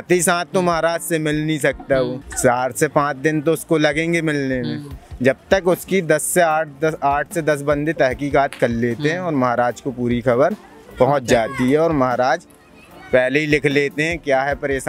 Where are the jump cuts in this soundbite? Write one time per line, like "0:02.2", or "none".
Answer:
none